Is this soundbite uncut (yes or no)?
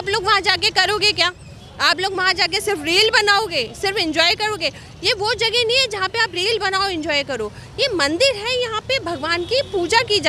yes